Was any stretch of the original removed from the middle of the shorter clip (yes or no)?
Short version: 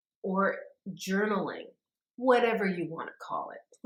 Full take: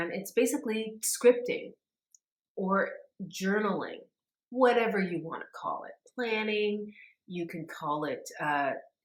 no